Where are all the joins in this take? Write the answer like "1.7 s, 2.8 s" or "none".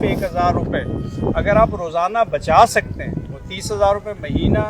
none